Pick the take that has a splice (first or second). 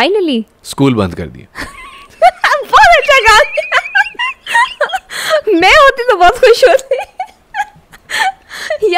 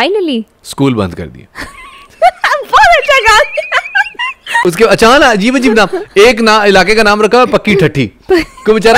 second